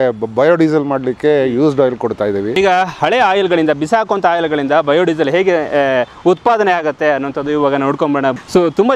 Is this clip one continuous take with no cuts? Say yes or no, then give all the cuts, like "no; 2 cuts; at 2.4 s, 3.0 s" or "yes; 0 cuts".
no; 1 cut; at 2.5 s